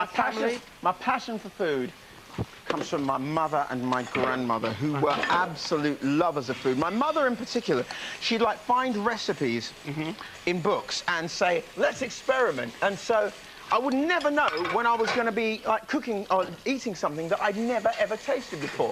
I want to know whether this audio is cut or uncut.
cut